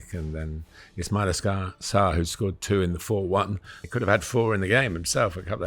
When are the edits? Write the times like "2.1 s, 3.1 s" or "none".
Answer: 3.8 s